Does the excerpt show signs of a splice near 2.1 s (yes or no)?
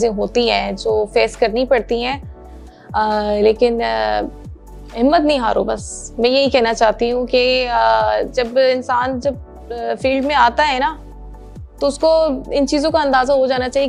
no